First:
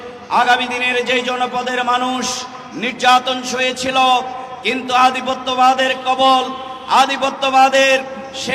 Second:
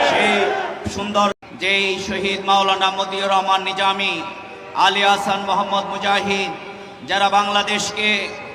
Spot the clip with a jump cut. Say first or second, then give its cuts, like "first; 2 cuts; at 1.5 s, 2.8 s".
second; 1 cut; at 1.4 s